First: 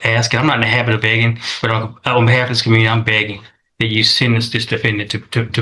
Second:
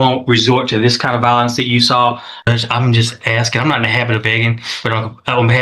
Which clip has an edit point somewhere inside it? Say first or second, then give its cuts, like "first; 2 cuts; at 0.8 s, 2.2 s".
second; 1 cut; at 2.3 s